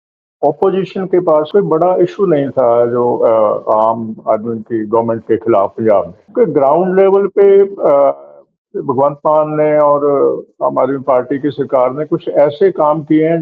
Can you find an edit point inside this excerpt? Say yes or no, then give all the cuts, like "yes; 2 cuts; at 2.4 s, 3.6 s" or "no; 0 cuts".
yes; 2 cuts; at 1.5 s, 6.2 s